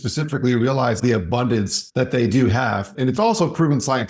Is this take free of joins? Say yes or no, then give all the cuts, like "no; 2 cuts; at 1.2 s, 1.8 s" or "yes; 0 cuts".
no; 2 cuts; at 1.5 s, 2.9 s